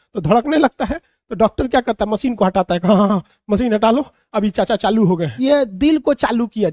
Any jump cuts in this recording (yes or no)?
yes